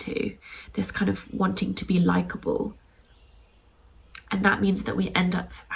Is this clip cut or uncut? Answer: uncut